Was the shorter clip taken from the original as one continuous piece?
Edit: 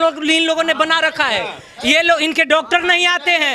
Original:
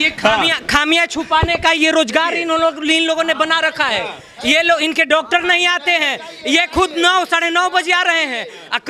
yes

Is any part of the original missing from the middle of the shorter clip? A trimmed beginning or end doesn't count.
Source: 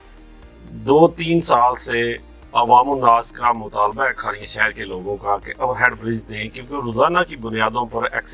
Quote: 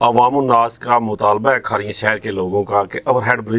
no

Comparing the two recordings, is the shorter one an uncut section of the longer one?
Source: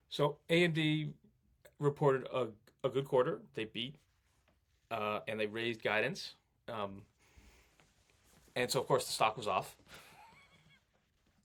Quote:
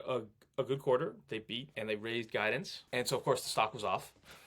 no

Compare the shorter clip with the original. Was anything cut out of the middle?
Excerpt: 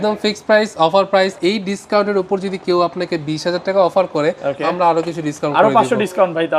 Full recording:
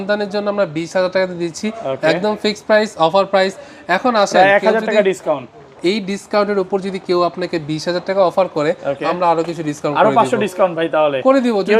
yes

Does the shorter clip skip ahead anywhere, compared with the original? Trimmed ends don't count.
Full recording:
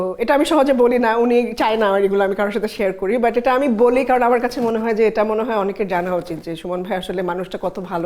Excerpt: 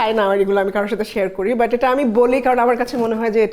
no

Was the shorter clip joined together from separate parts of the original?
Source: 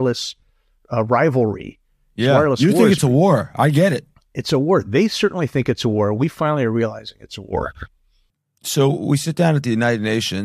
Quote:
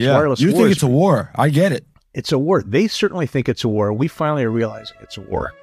no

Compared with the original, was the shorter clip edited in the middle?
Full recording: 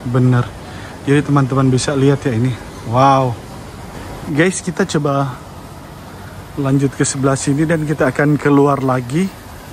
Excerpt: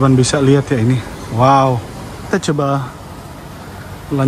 yes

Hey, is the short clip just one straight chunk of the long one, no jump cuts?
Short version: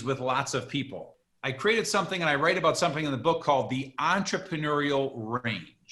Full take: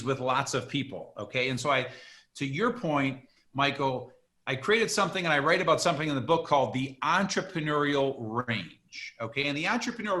no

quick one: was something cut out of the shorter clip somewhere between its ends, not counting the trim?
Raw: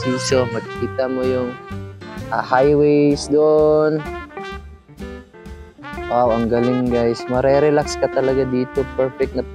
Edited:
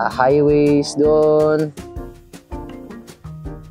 no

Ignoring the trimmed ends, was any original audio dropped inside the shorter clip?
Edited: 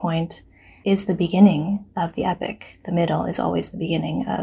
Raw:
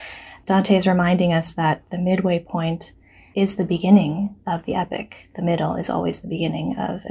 no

